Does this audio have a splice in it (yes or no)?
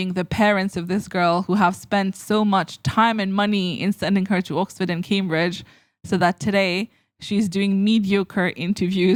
no